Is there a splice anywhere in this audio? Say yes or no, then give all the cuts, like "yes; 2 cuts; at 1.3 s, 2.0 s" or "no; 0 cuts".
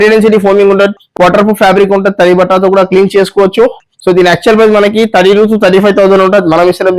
no; 0 cuts